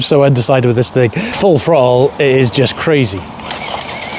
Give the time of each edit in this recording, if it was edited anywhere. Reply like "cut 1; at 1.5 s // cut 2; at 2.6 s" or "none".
cut 1; at 1.4 s